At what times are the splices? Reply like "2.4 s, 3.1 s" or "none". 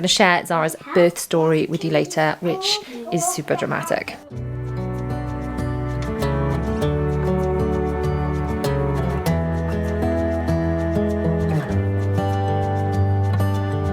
none